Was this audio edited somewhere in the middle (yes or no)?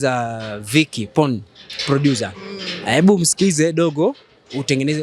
no